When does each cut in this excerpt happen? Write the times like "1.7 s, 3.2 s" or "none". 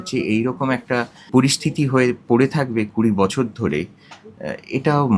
1.2 s